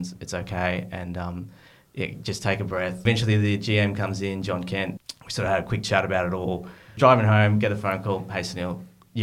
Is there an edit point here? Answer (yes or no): yes